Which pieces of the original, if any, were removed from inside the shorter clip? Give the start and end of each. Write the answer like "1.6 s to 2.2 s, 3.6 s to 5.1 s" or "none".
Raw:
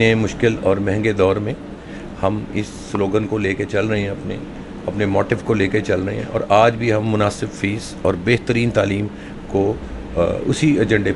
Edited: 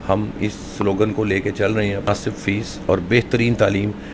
4.2 s to 7.2 s

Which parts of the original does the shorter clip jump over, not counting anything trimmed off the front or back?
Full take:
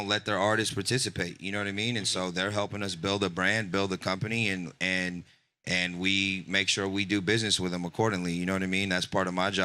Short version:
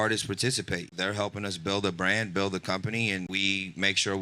1.4 s to 2.3 s, 4.7 s to 6.0 s

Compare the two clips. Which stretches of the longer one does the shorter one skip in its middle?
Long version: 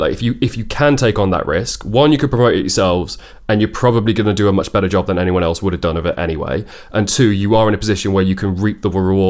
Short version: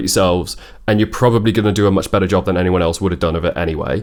none

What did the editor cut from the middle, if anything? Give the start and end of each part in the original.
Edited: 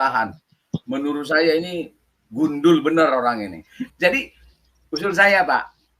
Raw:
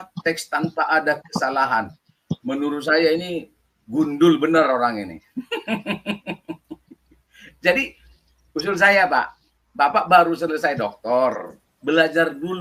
5.5 s to 7.5 s

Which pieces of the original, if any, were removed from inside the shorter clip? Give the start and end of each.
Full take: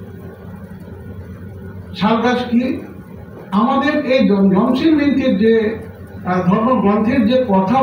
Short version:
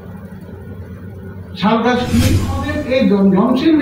3.1 s to 3.9 s

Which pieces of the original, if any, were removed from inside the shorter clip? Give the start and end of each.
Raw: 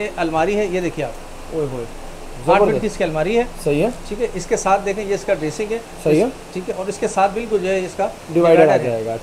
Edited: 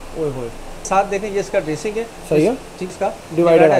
2.2 s to 4.6 s, 6.7 s to 7.9 s

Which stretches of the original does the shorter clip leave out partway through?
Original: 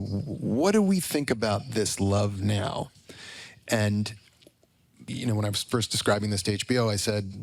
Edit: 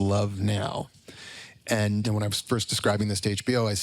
4.1 s to 5.3 s

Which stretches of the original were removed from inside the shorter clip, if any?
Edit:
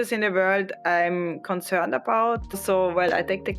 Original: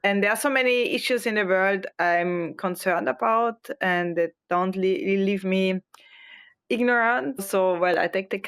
3.7 s to 7.4 s

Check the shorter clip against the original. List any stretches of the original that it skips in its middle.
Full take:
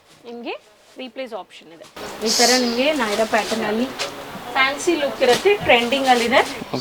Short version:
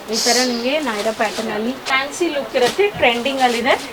4.0 s to 4.5 s

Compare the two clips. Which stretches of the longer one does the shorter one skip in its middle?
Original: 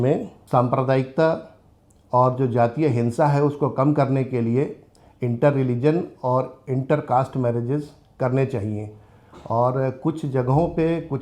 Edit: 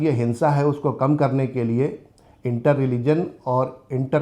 none

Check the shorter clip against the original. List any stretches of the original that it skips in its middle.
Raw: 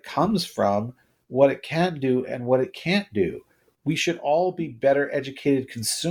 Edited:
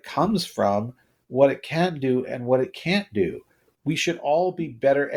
none

